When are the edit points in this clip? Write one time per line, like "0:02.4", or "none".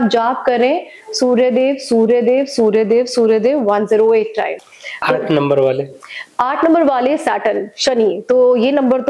0:04.6